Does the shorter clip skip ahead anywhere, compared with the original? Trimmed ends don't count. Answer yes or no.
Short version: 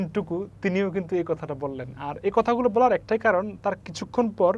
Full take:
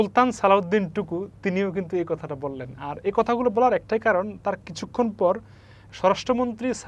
no